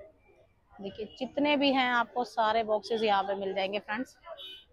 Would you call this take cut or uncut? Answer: uncut